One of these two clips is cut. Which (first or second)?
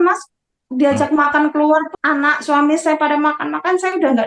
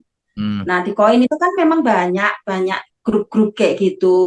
first